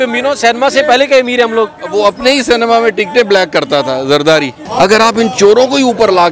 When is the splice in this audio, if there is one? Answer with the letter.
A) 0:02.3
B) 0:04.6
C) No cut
B